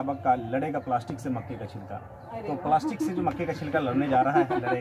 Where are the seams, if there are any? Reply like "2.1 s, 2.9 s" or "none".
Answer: none